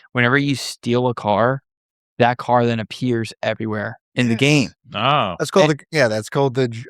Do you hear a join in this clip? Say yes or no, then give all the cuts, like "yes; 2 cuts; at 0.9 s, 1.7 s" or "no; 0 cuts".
no; 0 cuts